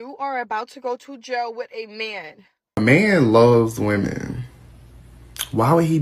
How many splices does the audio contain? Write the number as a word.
one